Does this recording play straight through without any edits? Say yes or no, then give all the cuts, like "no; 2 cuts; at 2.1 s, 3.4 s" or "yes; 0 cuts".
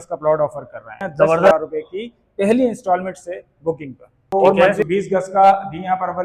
no; 2 cuts; at 1.5 s, 4.8 s